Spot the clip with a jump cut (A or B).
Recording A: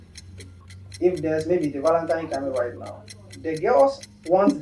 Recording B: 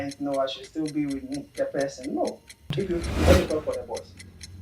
B